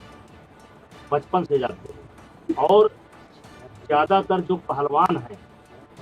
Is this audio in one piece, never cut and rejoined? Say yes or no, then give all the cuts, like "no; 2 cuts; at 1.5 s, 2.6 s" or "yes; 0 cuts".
yes; 0 cuts